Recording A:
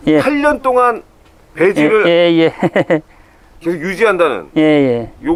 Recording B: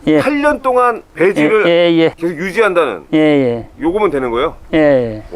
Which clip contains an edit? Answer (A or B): B